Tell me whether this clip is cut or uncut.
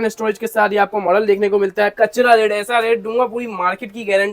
cut